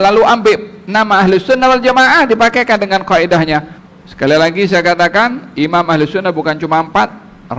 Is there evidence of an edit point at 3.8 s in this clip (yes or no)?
yes